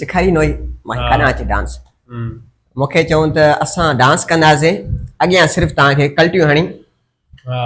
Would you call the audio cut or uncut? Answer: uncut